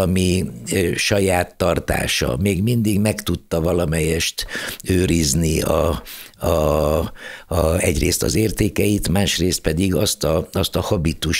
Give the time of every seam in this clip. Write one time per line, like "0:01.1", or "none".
none